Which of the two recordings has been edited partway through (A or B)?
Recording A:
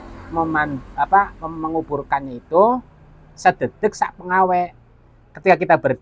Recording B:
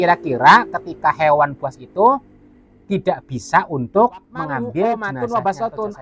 B